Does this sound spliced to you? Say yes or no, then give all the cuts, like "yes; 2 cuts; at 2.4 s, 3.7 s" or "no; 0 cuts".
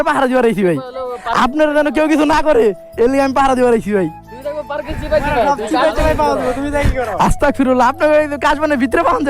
no; 0 cuts